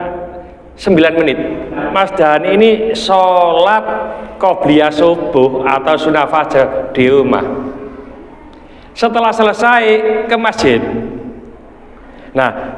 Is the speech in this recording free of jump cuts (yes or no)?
no